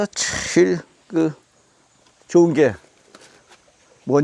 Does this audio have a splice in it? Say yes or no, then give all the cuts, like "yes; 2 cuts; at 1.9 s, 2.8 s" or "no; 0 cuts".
no; 0 cuts